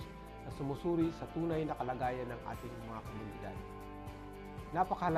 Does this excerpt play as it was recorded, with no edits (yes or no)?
yes